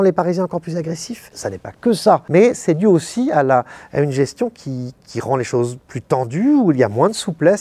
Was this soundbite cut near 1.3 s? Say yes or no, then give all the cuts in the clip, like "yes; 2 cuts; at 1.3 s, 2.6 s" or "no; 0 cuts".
yes; 1 cut; at 1.3 s